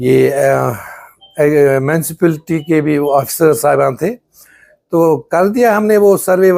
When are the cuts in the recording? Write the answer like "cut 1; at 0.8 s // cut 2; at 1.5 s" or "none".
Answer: none